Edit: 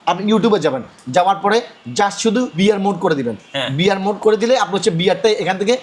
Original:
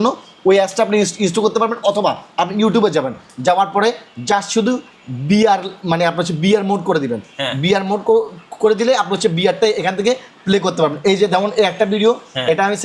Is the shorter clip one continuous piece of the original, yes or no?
no